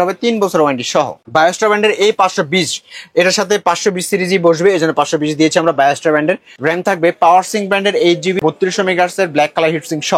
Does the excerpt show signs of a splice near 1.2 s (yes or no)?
yes